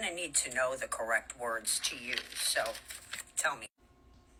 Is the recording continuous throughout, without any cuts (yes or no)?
yes